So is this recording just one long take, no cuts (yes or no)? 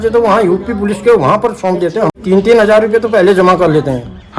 no